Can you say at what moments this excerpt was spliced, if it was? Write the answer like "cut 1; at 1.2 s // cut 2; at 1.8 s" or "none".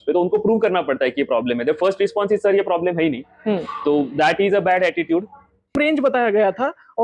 cut 1; at 5.8 s